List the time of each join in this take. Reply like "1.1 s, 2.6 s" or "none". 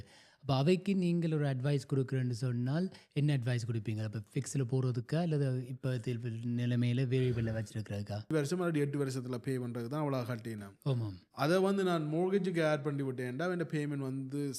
8.3 s